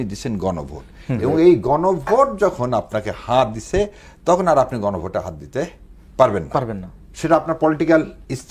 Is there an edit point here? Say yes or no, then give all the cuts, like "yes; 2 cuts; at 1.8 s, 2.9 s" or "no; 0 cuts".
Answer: no; 0 cuts